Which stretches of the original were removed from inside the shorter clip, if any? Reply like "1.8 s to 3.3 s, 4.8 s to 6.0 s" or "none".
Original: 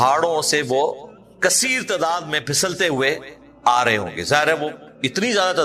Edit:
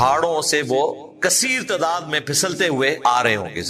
1.1 s to 1.3 s, 3.2 s to 3.6 s